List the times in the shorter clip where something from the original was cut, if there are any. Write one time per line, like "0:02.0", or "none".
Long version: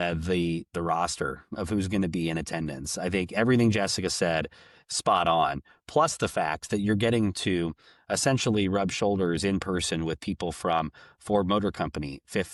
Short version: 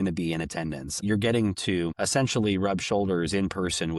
0:01.0
0:02.0